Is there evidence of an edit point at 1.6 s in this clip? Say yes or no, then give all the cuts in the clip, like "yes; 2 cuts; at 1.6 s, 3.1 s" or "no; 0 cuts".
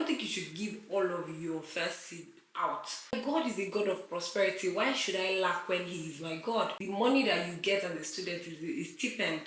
no; 2 cuts; at 3.1 s, 6.8 s